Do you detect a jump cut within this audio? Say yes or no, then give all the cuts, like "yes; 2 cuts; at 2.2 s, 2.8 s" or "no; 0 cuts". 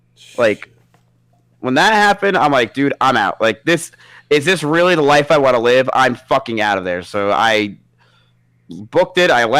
no; 0 cuts